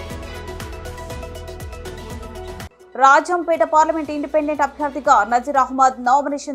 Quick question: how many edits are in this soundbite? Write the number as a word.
zero